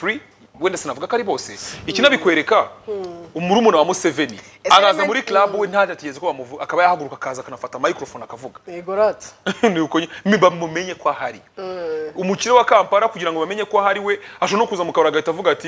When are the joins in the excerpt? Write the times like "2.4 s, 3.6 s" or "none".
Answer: none